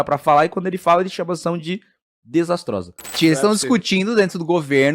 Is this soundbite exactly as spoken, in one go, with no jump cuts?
no; 1 cut; at 3.2 s

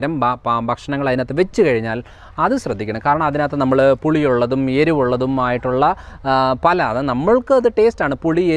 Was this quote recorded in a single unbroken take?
yes; 0 cuts

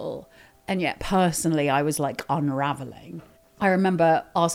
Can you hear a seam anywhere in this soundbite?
no; 0 cuts

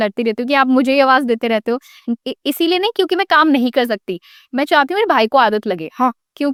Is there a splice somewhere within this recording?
no; 0 cuts

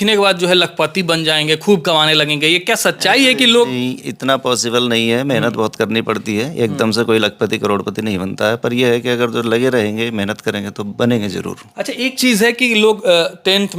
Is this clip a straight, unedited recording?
yes; 0 cuts

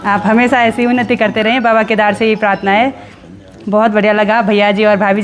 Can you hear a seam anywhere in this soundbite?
no; 0 cuts

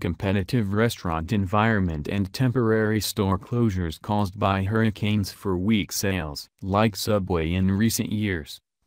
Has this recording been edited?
no; 0 cuts

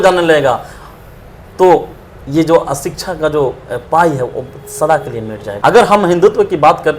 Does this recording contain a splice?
yes; 1 cut; at 5.4 s

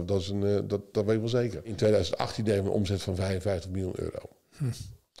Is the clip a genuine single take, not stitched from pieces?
no; 1 cut; at 1.7 s

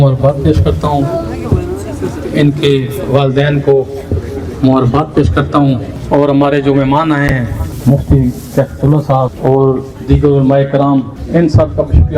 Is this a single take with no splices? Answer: no; 4 cuts; at 5.9 s, 7.7 s, 9.3 s, 11.2 s

